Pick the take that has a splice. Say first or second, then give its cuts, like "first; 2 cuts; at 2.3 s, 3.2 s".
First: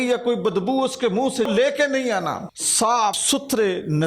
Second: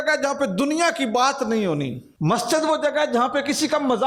first; 2 cuts; at 1.5 s, 2.9 s